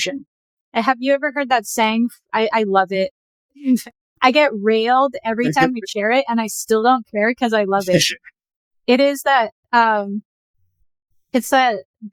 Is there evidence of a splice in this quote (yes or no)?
no